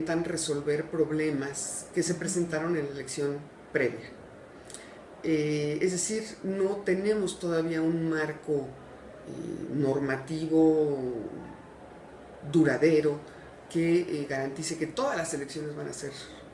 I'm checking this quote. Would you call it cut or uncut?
cut